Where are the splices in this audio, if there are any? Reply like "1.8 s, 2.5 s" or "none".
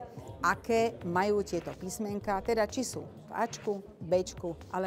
none